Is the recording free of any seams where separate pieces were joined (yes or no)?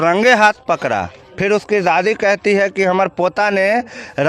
yes